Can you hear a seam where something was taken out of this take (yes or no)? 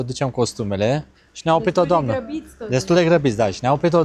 no